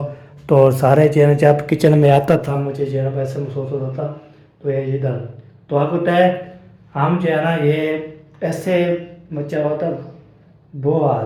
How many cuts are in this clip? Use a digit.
0